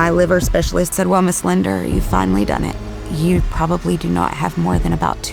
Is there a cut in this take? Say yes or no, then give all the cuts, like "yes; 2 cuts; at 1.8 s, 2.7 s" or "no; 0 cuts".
yes; 1 cut; at 0.9 s